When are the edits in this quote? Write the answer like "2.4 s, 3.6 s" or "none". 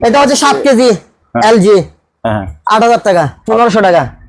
3.4 s